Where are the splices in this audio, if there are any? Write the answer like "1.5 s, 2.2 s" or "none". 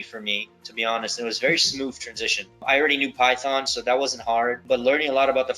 2.6 s, 4.6 s